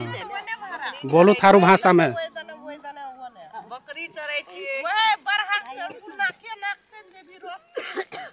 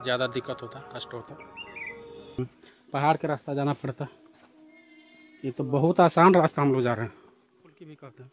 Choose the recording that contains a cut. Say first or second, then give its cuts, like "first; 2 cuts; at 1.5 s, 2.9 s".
second; 1 cut; at 2.4 s